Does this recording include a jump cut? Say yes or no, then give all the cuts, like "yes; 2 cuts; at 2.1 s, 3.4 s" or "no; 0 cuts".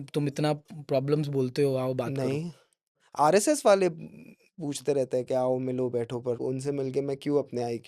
yes; 1 cut; at 6.4 s